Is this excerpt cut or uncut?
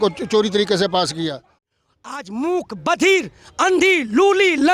cut